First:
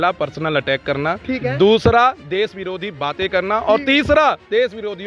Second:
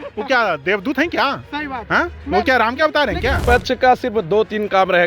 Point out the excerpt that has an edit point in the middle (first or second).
second